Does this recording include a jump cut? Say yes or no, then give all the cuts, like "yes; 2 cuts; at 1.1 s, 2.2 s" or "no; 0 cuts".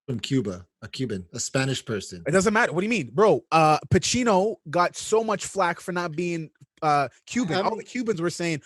no; 0 cuts